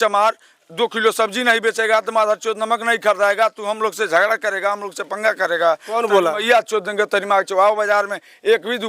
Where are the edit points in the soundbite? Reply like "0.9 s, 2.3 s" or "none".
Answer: none